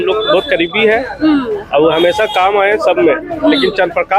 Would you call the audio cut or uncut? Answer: uncut